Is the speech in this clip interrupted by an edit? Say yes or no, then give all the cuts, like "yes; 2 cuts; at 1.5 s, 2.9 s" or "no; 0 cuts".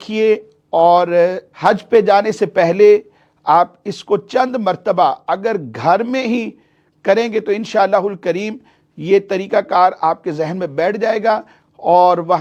no; 0 cuts